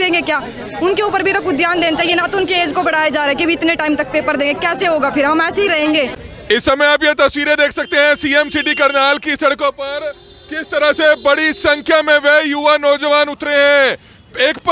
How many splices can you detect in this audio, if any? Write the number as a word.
one